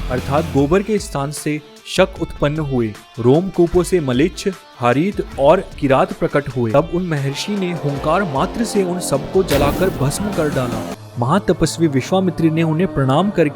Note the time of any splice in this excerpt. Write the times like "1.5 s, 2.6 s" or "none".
6.7 s, 11.0 s